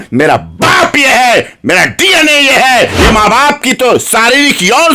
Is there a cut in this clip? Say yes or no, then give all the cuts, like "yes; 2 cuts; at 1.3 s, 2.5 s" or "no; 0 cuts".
yes; 1 cut; at 2.9 s